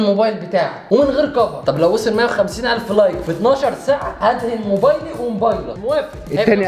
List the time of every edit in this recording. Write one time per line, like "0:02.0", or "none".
0:05.8